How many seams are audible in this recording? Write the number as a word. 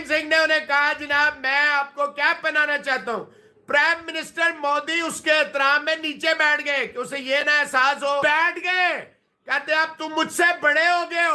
one